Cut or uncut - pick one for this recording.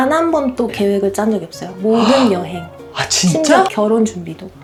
uncut